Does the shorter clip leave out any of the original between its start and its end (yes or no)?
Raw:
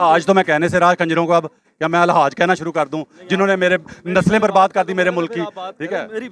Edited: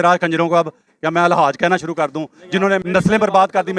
yes